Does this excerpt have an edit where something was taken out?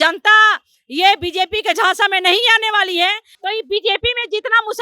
yes; 1 cut; at 3.3 s

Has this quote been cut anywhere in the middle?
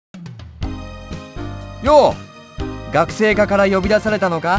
yes; 1 cut; at 1.7 s

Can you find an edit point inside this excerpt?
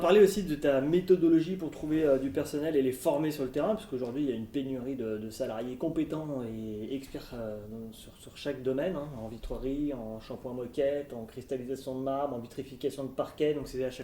no; 0 cuts

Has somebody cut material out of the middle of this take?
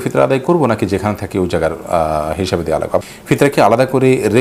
yes; 1 cut; at 3.0 s

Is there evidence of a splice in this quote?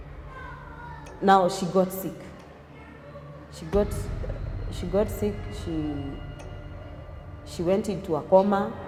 no; 0 cuts

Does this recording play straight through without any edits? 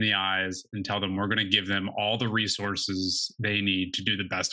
yes; 0 cuts

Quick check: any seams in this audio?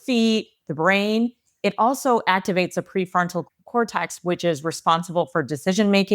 no; 0 cuts

